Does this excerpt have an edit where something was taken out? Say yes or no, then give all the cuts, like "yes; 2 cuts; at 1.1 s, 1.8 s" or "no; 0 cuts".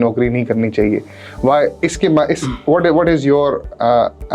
no; 0 cuts